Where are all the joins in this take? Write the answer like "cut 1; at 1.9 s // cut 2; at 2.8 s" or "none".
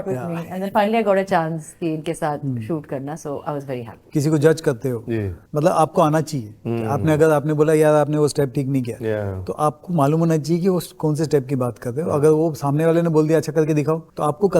cut 1; at 4.0 s